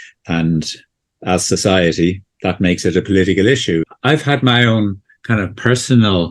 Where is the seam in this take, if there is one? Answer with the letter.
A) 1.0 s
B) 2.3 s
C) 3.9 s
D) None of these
C